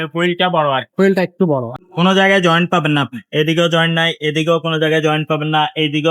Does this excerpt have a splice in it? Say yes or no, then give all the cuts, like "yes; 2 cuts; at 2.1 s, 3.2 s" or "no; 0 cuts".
yes; 1 cut; at 1.8 s